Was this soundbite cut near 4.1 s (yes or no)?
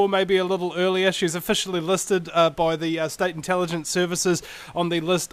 no